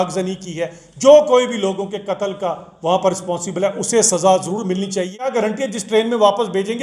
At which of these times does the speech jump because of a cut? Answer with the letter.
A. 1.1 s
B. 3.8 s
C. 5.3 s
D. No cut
C